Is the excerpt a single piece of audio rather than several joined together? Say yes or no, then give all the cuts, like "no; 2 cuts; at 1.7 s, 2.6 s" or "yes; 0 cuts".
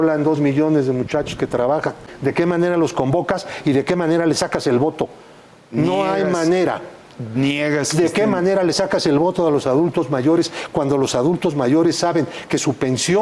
no; 1 cut; at 2.1 s